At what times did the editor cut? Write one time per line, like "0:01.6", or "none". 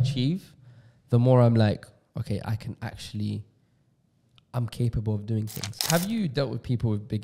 0:05.9

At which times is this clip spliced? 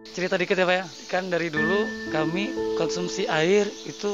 0:01.0
0:02.6

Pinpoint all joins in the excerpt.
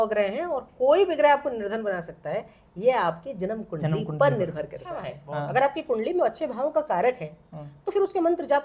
0:05.2

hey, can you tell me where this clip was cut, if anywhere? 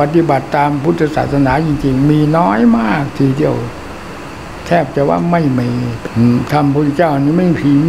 0:06.0

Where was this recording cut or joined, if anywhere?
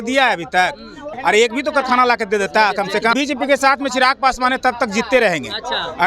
0:01.0
0:03.1

